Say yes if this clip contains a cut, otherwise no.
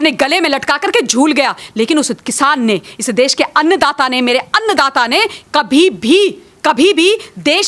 no